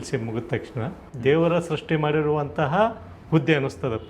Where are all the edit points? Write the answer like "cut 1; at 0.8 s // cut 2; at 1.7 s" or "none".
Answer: cut 1; at 1.0 s

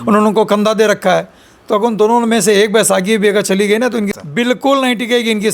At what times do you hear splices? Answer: cut 1; at 4.1 s

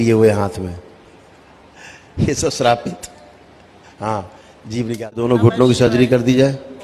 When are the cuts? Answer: cut 1; at 5.2 s

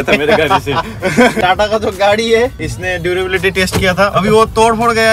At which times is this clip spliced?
cut 1; at 1.4 s

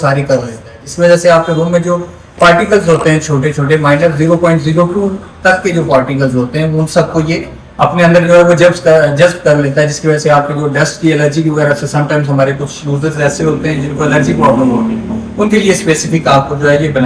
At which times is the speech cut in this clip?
none

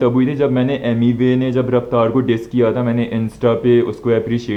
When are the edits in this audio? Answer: none

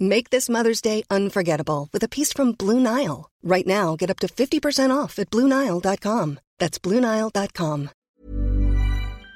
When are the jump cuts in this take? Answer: cut 1; at 8.1 s

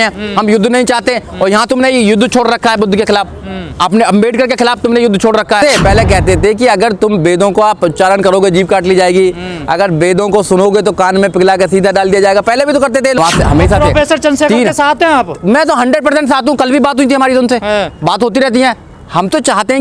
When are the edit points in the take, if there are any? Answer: cut 1; at 5.6 s // cut 2; at 13.2 s

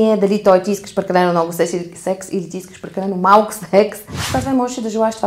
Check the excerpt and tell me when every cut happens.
cut 1; at 4.1 s

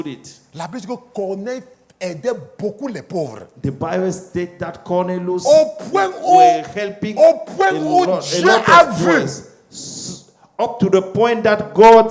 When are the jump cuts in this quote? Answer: none

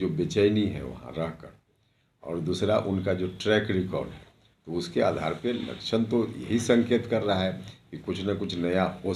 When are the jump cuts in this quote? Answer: none

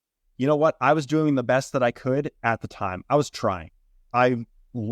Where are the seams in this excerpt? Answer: cut 1; at 4.0 s

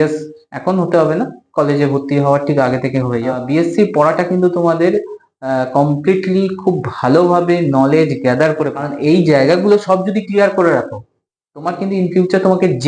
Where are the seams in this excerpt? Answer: cut 1; at 3.4 s // cut 2; at 8.9 s

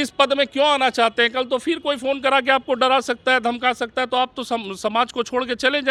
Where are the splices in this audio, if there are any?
none

